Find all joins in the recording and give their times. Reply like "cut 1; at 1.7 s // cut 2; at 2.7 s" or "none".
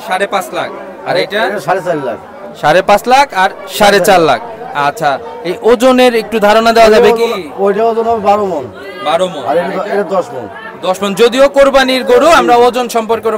none